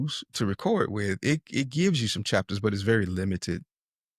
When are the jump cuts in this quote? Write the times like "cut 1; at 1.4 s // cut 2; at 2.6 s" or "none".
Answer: none